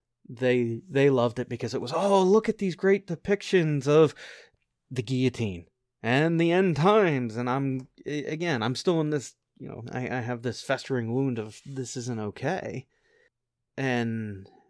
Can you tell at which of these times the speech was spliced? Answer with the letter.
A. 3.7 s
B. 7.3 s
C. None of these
C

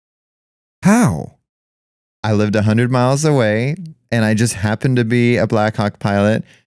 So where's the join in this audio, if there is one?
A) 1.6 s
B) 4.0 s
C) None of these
C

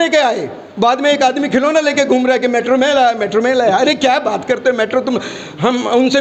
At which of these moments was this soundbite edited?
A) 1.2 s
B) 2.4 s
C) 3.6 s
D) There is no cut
D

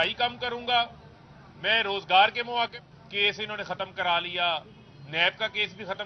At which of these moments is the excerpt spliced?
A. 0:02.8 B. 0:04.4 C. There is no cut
A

